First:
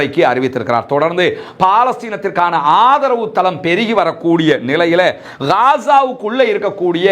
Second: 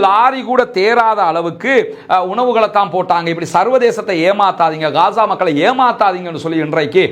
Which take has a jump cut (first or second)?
first